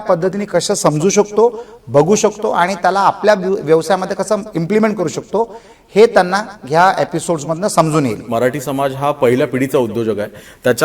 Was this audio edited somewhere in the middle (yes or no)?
yes